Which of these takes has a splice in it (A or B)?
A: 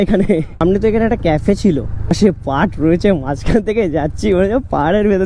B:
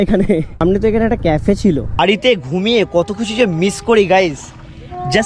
B